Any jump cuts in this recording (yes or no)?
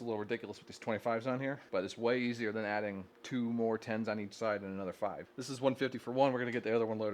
yes